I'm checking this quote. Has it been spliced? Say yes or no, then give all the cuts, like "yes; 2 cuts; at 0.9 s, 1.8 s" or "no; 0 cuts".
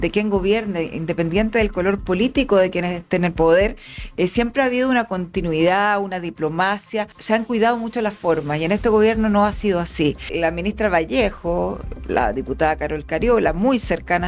yes; 2 cuts; at 7.2 s, 10.3 s